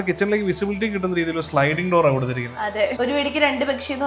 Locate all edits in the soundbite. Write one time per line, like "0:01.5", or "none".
0:03.0

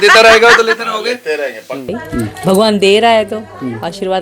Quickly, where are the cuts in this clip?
0:01.9

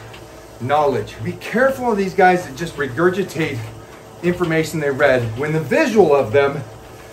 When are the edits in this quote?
0:01.2
0:02.6
0:05.3

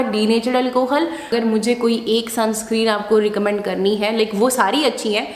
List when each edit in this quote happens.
0:01.3

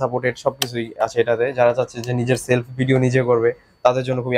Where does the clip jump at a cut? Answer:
none

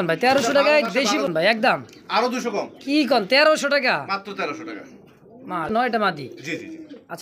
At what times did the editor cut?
0:01.3
0:05.7

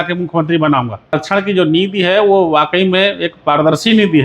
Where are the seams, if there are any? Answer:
0:01.1

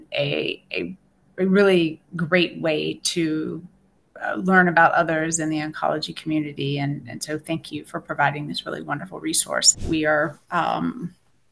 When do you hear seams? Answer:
0:09.8

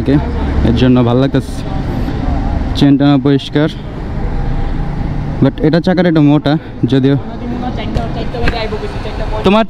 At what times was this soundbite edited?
none

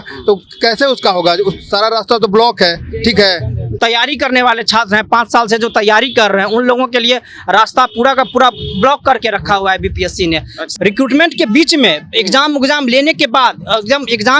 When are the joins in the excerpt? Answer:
0:03.6
0:10.6

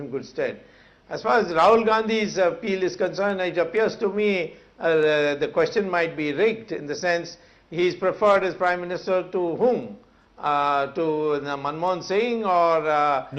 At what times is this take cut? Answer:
0:08.2

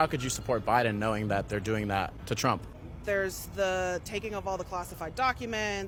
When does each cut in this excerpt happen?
none

